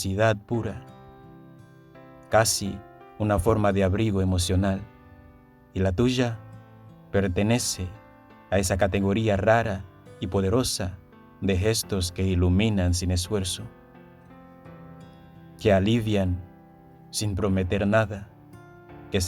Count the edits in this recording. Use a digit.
2